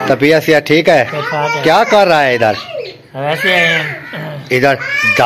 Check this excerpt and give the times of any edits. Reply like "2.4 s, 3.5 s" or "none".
none